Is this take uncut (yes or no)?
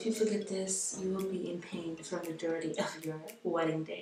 yes